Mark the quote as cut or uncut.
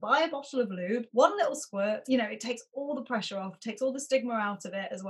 cut